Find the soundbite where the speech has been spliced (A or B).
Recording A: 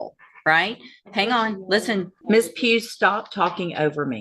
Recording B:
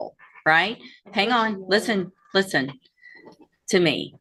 A